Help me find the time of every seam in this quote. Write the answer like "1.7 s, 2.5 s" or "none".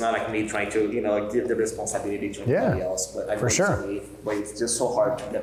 none